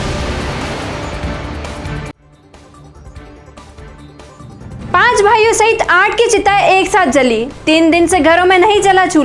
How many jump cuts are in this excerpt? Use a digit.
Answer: 0